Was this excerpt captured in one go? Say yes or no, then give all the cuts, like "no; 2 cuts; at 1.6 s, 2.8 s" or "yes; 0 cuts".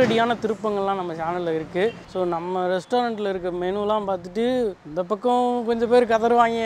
yes; 0 cuts